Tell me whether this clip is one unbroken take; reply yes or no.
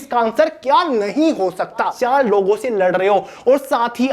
no